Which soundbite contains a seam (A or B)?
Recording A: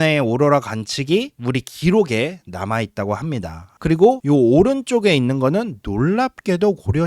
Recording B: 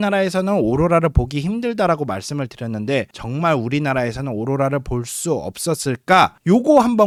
A